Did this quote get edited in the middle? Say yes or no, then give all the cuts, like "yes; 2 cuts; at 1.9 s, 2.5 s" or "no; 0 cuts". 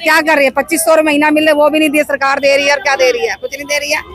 no; 0 cuts